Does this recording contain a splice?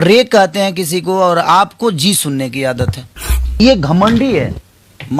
yes; 1 cut; at 3.6 s

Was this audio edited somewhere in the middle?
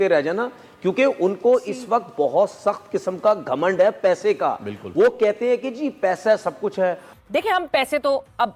yes; 1 cut; at 7.1 s

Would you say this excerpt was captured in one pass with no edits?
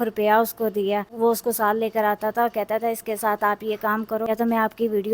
no; 2 cuts; at 1.1 s, 4.3 s

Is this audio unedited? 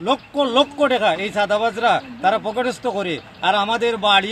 yes; 0 cuts

